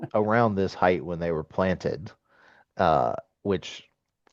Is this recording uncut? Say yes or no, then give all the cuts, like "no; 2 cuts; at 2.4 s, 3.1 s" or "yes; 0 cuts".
yes; 0 cuts